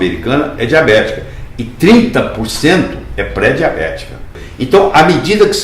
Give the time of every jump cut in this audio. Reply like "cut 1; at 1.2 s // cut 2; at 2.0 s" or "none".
cut 1; at 4.4 s